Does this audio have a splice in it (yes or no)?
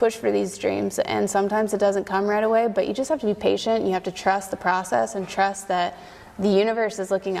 no